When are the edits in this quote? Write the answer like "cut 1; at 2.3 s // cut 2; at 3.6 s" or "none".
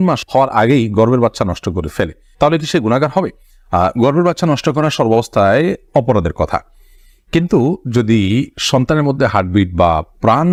none